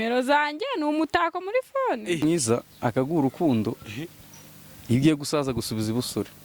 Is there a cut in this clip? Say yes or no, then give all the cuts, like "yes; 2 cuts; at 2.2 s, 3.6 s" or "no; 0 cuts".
yes; 1 cut; at 2.2 s